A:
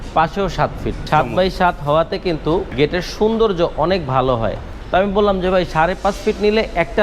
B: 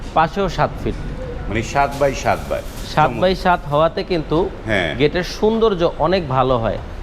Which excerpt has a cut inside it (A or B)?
A